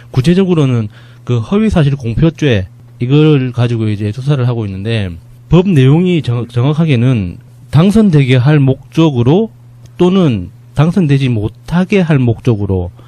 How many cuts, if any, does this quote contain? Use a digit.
0